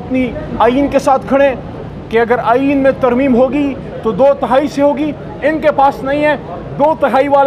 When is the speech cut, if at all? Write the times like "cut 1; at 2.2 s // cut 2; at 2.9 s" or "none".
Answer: cut 1; at 1.7 s